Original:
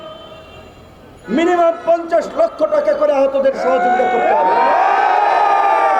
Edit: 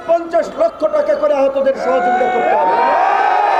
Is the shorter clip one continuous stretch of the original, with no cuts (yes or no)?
yes